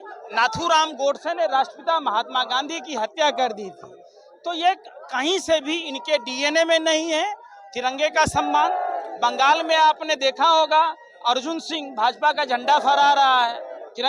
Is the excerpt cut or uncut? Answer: uncut